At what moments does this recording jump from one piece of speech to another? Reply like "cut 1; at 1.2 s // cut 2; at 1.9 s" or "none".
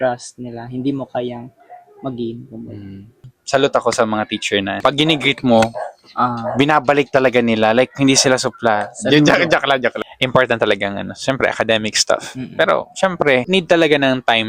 cut 1; at 3.3 s // cut 2; at 4.8 s // cut 3; at 10.0 s // cut 4; at 13.5 s